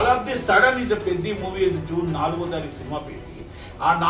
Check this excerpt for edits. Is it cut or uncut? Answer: uncut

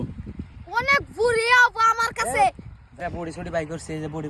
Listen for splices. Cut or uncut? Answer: cut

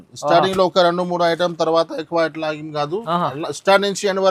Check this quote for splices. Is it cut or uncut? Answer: uncut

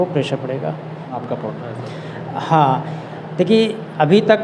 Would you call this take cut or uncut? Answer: cut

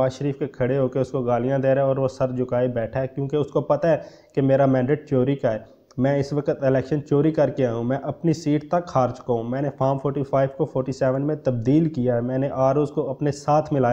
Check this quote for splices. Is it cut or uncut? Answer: uncut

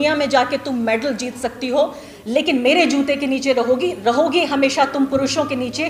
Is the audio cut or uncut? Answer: uncut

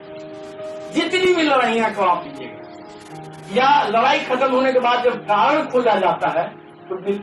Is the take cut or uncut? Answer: cut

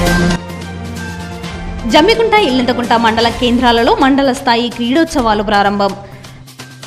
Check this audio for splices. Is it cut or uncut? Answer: cut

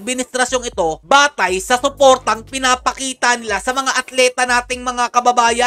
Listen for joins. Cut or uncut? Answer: uncut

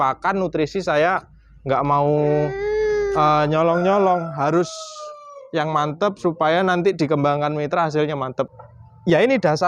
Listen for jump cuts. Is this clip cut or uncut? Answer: cut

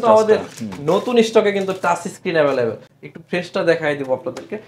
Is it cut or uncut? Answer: uncut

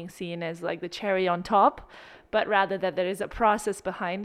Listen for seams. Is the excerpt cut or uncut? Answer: uncut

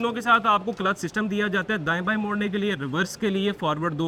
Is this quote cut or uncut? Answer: uncut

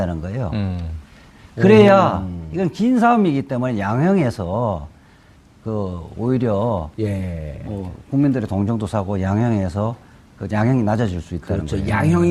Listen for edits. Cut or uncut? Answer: uncut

